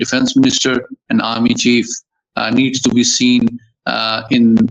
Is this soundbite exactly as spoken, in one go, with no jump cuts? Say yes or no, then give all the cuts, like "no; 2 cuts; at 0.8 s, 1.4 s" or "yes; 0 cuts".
yes; 0 cuts